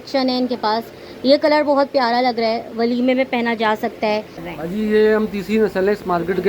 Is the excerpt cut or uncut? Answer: cut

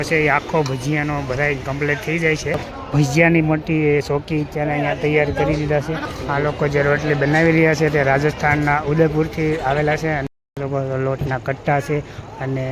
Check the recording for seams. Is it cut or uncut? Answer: cut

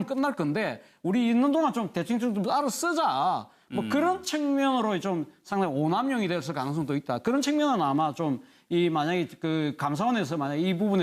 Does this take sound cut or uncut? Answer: uncut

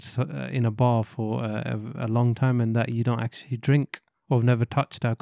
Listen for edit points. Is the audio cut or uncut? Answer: uncut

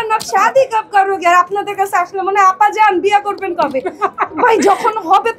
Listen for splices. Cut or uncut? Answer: uncut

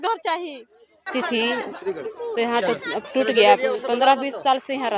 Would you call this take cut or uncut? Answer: cut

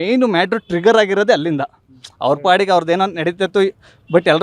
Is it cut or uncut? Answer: uncut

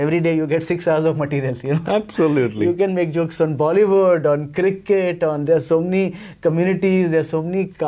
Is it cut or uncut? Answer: uncut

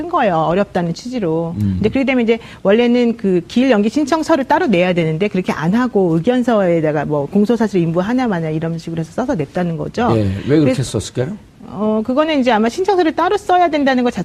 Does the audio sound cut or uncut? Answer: uncut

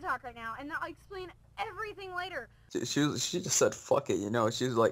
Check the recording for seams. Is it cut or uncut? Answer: cut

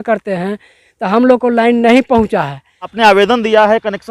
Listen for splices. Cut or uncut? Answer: cut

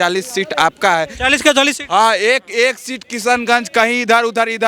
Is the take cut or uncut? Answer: uncut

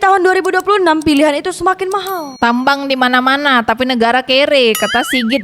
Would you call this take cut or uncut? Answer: cut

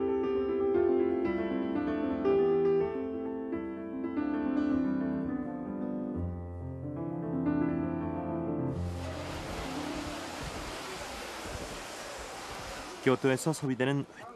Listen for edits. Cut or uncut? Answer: uncut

